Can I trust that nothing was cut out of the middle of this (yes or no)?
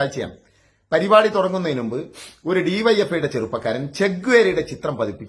yes